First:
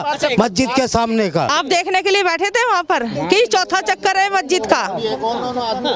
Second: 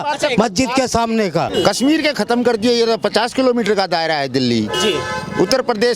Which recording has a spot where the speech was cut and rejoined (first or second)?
second